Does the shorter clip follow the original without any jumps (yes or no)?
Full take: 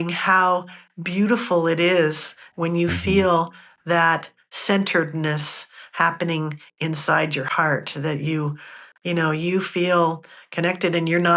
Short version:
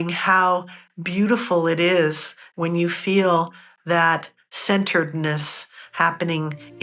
yes